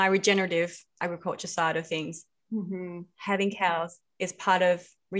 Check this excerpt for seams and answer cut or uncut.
uncut